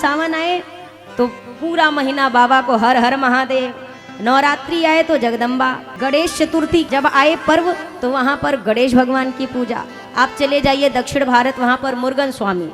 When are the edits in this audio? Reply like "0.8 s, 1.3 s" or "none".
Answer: 5.9 s, 6.9 s